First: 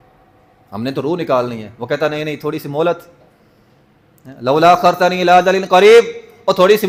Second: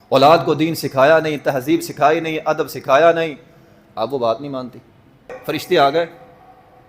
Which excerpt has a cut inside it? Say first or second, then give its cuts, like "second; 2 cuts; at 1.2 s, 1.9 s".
second; 1 cut; at 5.4 s